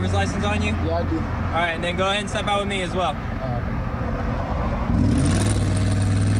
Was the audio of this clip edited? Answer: no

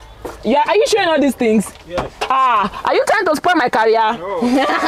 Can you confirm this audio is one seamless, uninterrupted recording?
yes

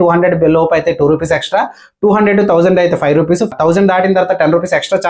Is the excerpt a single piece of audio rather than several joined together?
no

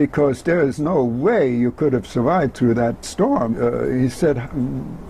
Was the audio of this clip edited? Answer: yes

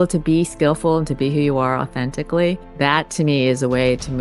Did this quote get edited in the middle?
yes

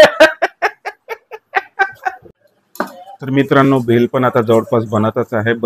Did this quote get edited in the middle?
yes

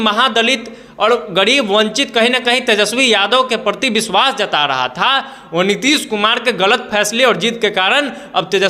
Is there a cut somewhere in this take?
no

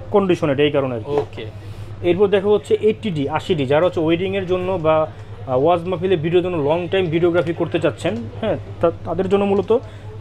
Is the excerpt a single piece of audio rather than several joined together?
yes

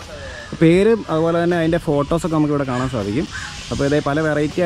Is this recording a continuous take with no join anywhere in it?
yes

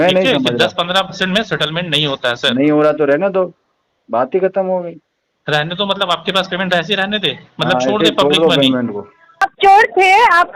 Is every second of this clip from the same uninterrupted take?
no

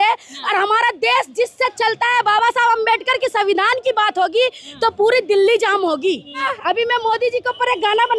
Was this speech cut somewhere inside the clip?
yes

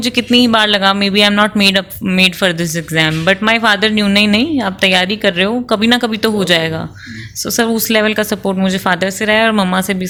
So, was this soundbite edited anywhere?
no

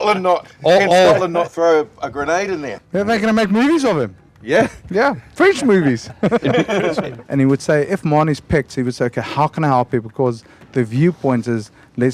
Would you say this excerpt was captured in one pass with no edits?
no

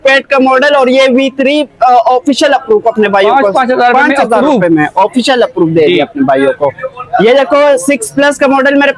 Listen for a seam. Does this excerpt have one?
no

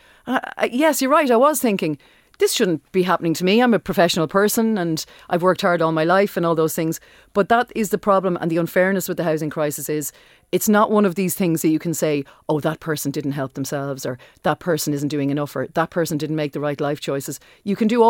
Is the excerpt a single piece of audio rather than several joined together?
yes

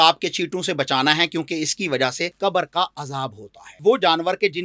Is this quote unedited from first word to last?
no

